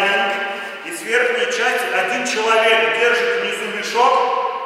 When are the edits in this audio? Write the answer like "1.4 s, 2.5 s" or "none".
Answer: none